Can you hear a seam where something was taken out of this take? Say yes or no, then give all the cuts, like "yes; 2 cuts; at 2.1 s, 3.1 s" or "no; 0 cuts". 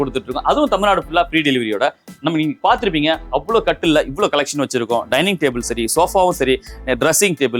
no; 0 cuts